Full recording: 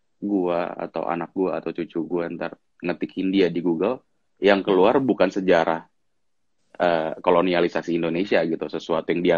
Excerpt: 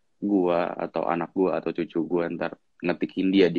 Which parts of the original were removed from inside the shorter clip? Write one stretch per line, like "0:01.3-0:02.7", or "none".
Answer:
none

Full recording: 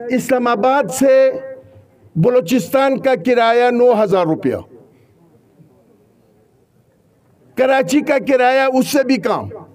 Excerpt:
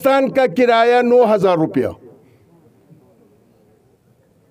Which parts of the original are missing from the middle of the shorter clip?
none

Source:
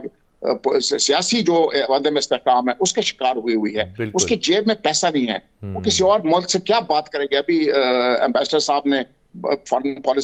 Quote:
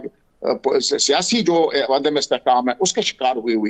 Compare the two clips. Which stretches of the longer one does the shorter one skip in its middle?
none

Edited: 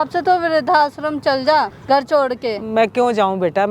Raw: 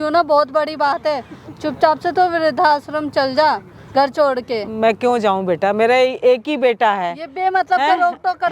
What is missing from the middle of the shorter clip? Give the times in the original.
0:03.7-0:03.8

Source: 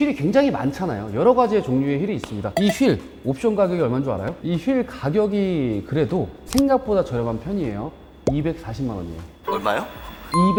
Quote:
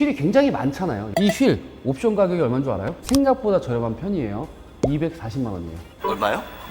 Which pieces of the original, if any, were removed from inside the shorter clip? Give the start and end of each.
0:01.0-0:02.4
0:04.3-0:06.4

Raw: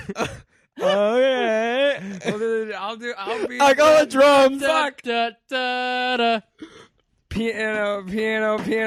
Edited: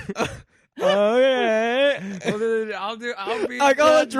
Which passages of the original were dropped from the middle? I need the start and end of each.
none

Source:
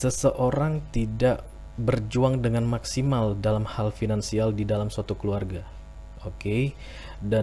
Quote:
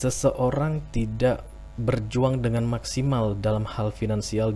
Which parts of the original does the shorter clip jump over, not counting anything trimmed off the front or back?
none

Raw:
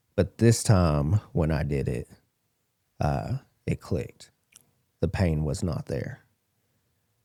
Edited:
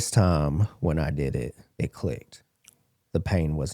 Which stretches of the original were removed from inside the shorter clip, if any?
0:02.2-0:03.5

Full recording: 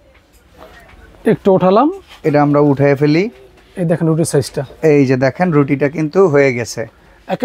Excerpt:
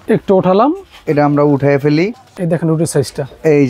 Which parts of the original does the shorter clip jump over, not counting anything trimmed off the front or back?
0:03.4-0:03.6

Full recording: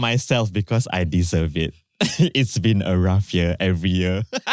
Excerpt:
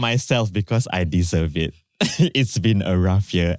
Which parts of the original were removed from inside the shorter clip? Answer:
none

